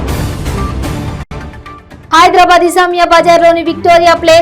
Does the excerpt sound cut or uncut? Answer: cut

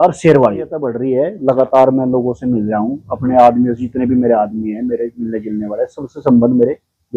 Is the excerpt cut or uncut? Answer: cut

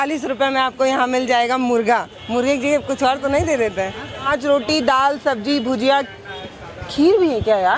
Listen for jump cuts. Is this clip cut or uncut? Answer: cut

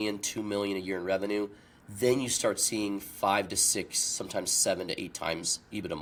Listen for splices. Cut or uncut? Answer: uncut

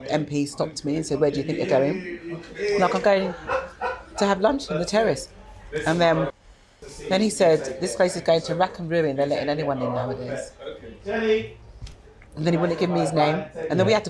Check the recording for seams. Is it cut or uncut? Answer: uncut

